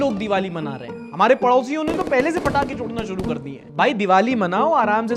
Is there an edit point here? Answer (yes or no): yes